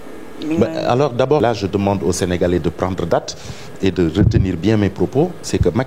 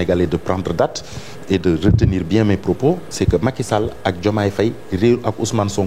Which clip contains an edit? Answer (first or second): first